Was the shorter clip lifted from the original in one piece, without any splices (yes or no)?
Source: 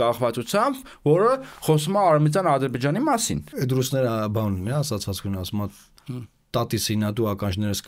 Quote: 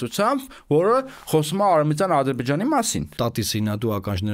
no